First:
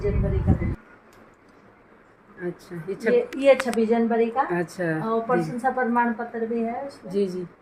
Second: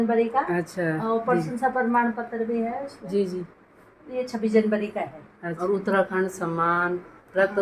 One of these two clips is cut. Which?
second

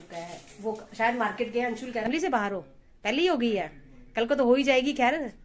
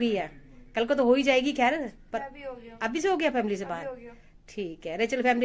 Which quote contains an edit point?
first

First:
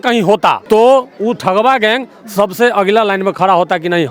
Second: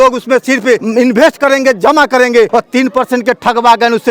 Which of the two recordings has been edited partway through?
second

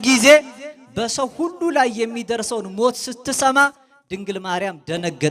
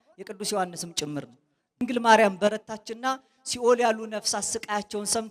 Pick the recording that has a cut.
second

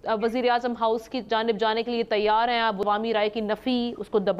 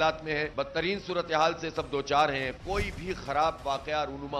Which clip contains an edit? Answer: first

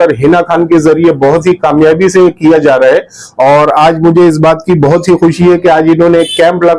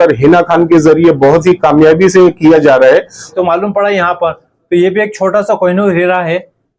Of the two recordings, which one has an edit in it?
second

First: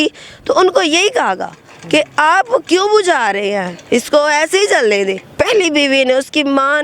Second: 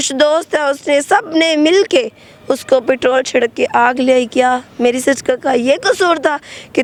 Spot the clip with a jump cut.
first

